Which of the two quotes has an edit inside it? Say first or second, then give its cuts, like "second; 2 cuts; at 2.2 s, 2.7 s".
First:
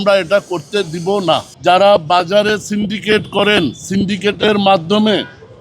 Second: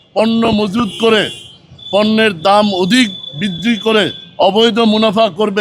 first; 1 cut; at 1.5 s